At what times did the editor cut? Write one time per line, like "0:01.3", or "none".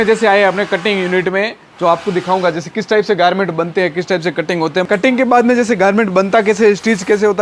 0:04.9